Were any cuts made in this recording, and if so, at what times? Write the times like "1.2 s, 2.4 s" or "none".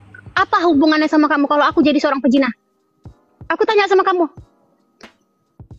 4.3 s